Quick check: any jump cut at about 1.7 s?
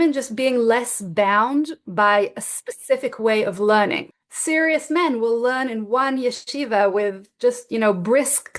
no; 1 cut; at 4.0 s

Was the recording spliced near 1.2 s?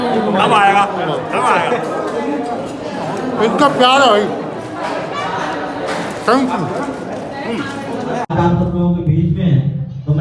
no; 1 cut; at 8.3 s

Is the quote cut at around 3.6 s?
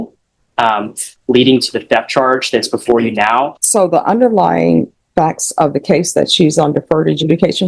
yes; 1 cut; at 3.6 s

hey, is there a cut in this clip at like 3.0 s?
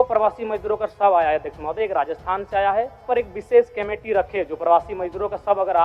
yes; 1 cut; at 3.0 s

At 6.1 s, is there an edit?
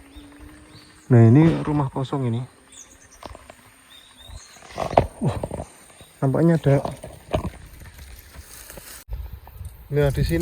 no; 1 cut; at 9.0 s

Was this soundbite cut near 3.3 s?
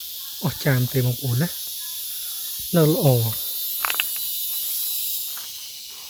no; 0 cuts

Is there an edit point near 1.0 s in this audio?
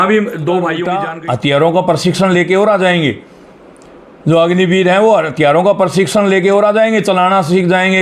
yes; 1 cut; at 1.0 s

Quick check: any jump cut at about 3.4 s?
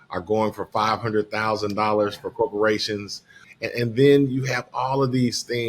yes; 1 cut; at 3.4 s

